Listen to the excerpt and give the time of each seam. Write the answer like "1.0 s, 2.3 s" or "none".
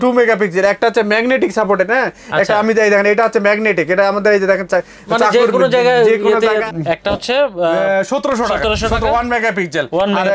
6.6 s

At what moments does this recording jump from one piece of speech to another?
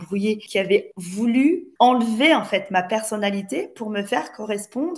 1.3 s

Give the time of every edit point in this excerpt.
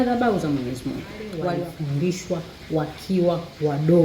1.7 s

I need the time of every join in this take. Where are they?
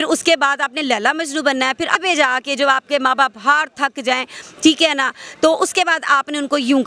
1.9 s

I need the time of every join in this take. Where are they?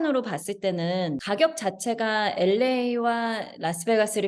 1.2 s

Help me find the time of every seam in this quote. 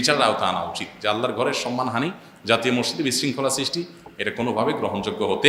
none

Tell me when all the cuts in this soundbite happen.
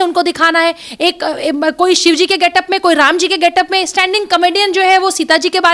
none

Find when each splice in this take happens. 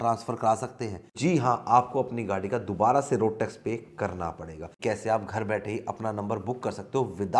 1.0 s, 4.6 s

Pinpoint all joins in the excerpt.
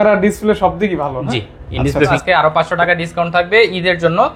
2.1 s

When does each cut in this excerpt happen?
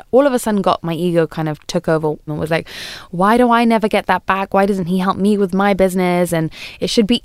2.3 s

